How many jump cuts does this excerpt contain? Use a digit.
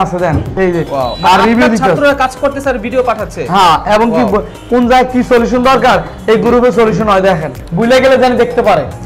1